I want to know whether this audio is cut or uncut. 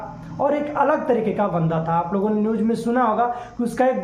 uncut